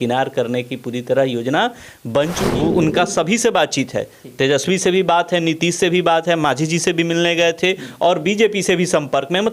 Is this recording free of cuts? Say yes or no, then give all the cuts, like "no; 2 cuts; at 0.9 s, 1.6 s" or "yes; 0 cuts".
no; 1 cut; at 2.4 s